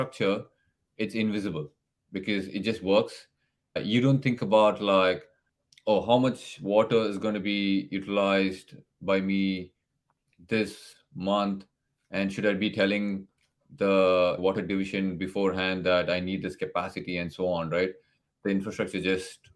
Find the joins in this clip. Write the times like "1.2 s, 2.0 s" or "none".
3.8 s, 14.4 s, 18.3 s

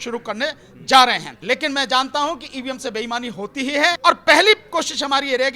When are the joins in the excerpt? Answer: 1.3 s, 4.0 s

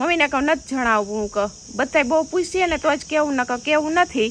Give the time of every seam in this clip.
none

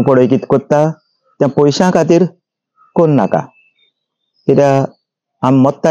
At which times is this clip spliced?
none

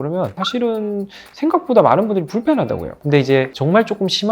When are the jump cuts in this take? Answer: 2.9 s

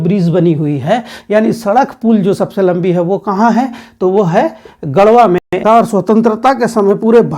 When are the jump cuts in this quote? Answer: 5.6 s

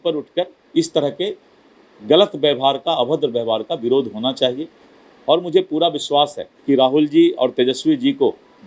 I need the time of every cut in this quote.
6.5 s

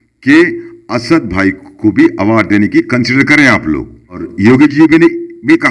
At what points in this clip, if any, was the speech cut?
4.3 s

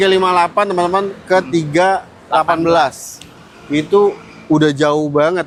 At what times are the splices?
none

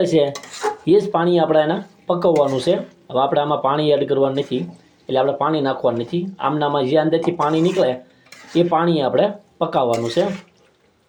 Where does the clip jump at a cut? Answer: none

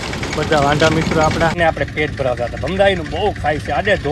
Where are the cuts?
1.6 s

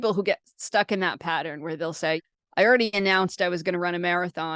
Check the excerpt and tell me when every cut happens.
2.2 s

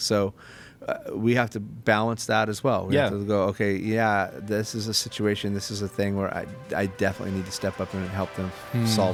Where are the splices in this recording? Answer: none

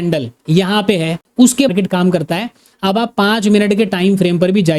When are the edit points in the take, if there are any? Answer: 1.7 s

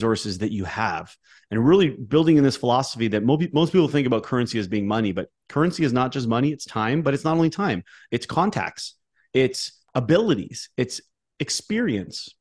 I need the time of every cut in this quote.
9.8 s

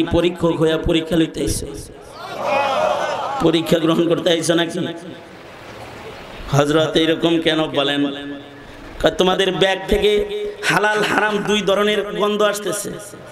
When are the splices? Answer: none

